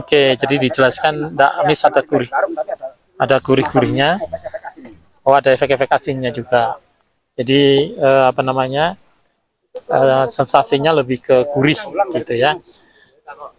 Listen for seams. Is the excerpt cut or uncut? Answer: uncut